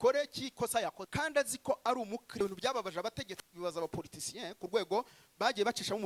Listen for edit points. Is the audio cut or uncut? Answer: cut